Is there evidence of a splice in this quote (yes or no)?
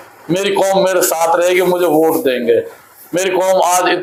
no